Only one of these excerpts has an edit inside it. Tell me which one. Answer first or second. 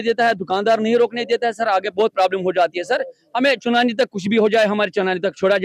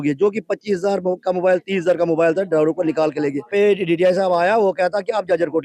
second